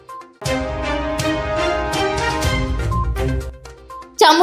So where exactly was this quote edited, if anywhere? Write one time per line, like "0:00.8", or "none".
0:03.5